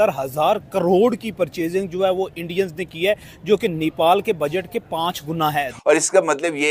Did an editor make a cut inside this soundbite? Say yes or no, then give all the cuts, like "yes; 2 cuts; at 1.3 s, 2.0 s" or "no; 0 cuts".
yes; 1 cut; at 5.7 s